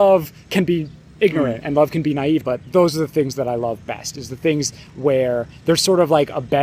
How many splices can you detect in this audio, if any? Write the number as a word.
one